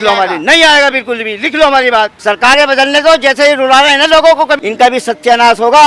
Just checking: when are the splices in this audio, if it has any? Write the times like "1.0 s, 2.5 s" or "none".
2.1 s, 4.6 s

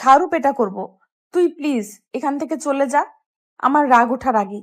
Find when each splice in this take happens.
none

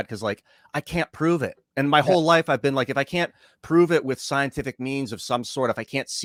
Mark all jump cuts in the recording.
none

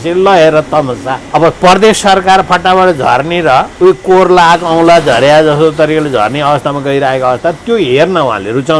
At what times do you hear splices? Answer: 1.1 s, 3.7 s

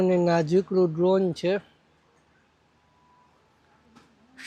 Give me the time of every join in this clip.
none

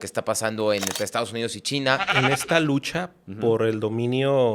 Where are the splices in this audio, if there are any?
2.1 s

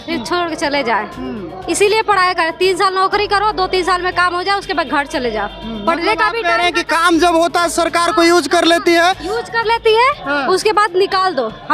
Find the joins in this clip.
none

